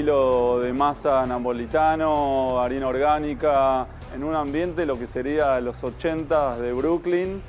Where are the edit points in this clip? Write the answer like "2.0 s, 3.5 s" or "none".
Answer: none